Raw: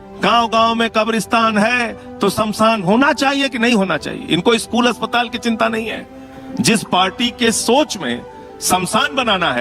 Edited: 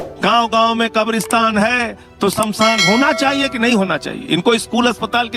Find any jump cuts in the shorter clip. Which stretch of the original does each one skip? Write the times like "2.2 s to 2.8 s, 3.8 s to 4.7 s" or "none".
none